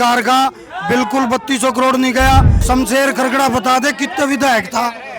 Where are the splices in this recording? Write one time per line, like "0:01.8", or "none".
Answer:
0:02.6